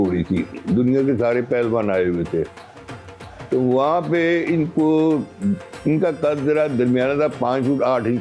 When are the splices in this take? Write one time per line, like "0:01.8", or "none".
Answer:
none

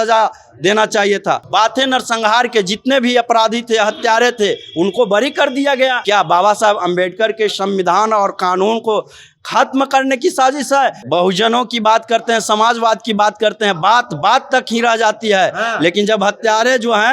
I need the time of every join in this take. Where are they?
0:01.5
0:06.0
0:11.0

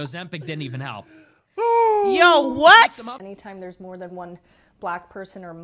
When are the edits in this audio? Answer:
0:03.2

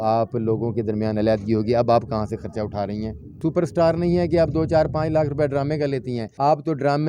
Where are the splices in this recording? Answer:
0:03.3
0:06.2

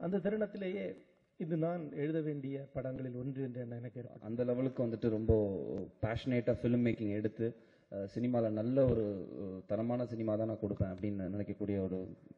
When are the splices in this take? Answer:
0:04.1

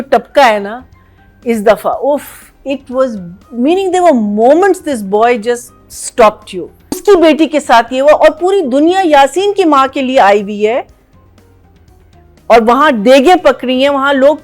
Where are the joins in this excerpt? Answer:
0:07.0

